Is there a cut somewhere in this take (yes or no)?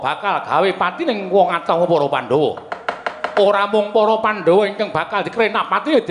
no